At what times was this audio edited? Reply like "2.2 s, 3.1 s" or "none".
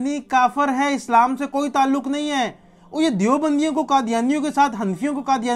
none